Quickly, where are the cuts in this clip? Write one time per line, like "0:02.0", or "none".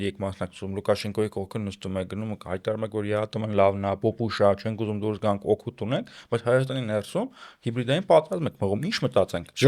none